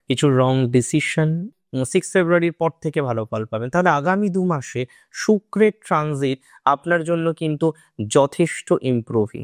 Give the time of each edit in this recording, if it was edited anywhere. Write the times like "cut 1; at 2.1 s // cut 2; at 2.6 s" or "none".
cut 1; at 1.6 s